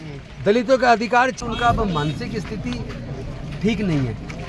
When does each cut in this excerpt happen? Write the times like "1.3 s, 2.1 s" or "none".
1.4 s